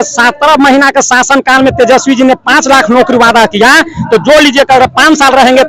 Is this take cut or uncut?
uncut